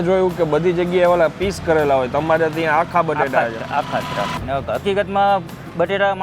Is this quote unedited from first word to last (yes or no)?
no